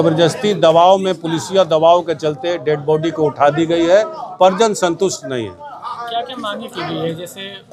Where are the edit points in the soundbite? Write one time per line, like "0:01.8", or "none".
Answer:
none